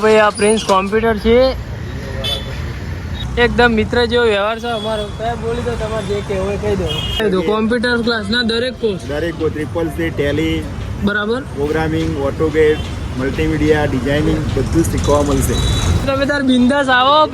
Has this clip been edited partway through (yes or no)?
yes